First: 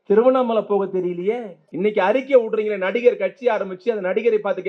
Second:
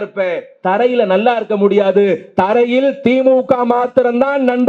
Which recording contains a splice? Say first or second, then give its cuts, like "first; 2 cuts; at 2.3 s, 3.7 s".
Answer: first; 1 cut; at 1.6 s